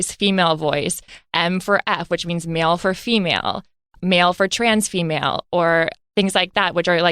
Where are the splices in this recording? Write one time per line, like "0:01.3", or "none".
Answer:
0:04.0